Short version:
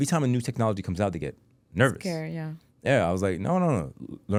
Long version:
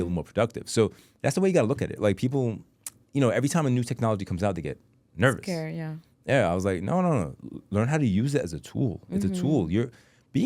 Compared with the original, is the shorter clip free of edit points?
yes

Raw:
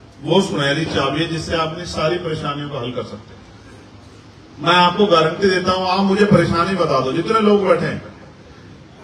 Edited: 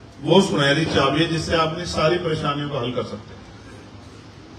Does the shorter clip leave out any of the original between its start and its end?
no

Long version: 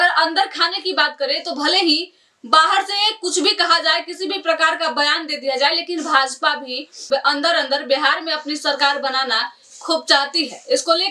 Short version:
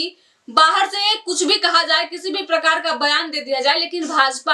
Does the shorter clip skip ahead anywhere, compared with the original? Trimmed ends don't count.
no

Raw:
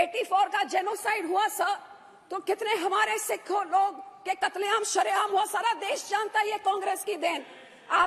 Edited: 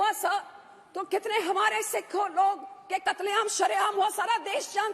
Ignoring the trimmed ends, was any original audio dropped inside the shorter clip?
no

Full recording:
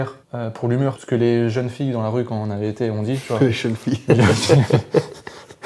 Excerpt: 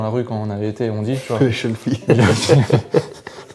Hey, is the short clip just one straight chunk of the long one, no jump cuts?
yes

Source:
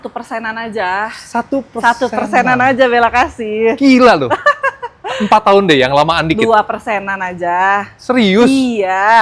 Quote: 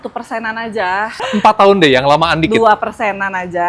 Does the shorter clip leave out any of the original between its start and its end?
yes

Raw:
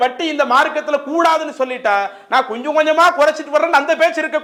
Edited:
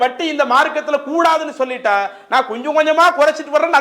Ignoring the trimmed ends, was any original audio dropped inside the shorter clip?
no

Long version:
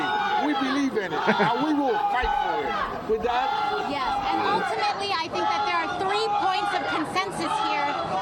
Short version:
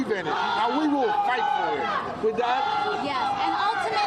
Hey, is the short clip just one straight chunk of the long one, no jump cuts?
yes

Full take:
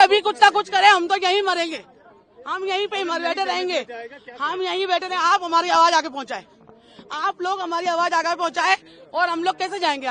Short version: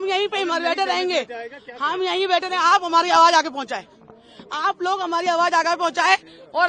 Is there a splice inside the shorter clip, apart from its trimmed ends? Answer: no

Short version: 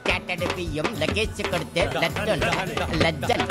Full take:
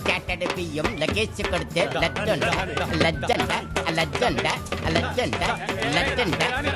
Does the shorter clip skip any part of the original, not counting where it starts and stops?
no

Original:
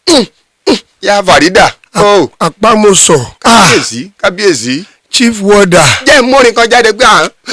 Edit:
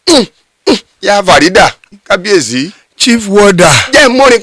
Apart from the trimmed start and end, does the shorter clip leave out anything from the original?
yes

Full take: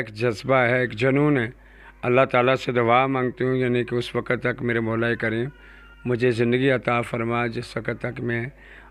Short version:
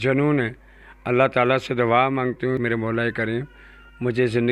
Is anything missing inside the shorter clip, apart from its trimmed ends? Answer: yes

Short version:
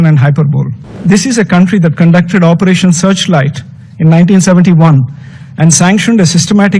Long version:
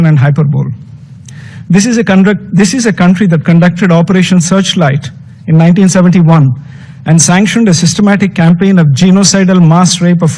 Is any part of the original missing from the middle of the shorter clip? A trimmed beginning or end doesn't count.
yes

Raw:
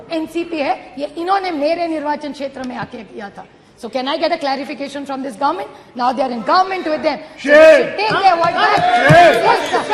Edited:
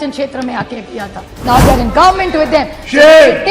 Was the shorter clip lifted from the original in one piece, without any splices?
no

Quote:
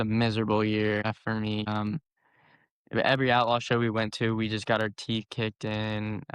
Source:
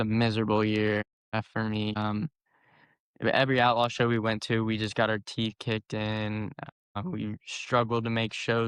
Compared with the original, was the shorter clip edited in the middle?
yes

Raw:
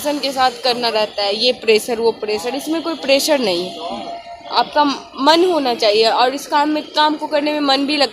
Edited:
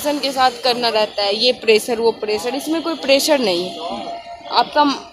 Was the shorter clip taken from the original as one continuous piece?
yes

